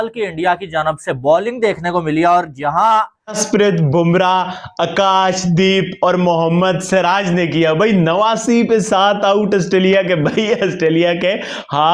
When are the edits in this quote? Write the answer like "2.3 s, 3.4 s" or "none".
3.4 s